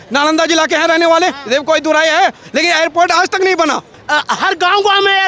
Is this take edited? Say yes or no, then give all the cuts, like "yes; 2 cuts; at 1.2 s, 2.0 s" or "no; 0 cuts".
yes; 1 cut; at 3.9 s